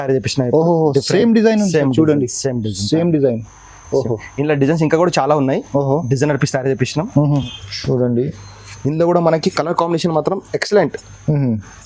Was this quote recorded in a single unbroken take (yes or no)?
no